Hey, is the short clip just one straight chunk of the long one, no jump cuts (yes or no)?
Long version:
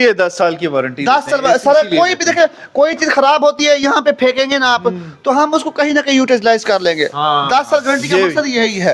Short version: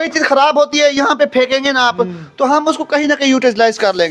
yes